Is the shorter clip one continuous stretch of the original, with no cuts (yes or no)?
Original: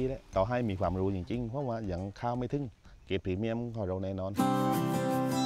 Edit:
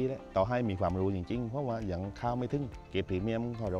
no